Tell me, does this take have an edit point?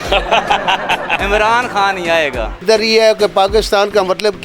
yes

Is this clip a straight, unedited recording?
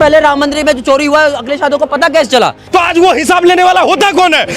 no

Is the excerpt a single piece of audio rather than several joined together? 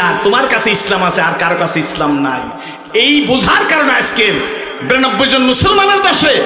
yes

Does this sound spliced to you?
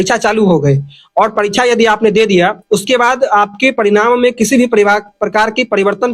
no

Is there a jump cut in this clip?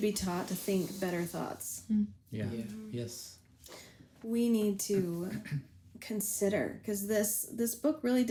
no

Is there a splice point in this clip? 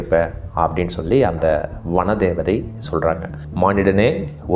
yes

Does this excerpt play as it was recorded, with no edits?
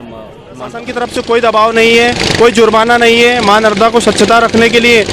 no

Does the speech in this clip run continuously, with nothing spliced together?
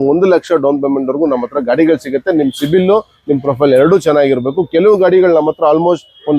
yes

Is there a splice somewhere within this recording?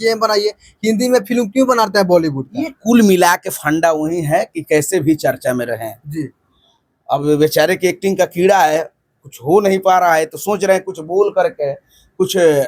no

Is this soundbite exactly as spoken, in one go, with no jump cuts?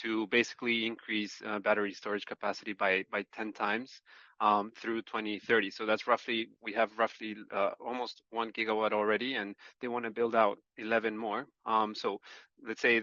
yes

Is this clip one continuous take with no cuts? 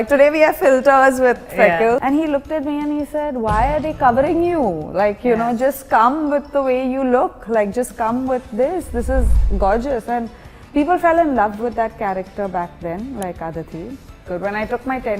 no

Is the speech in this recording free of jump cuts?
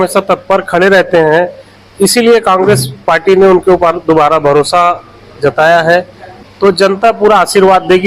no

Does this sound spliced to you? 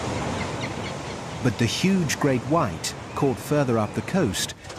yes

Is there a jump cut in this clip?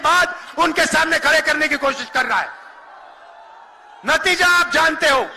no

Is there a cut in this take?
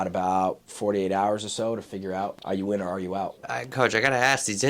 yes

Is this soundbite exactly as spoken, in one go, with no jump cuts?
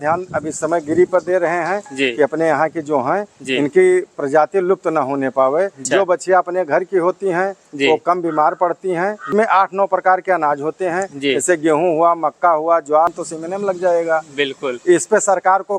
no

